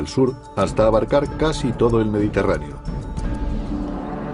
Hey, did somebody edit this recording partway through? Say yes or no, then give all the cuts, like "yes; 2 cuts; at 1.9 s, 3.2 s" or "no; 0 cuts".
yes; 1 cut; at 3.0 s